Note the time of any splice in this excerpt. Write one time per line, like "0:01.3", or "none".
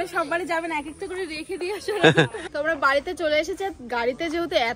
0:02.4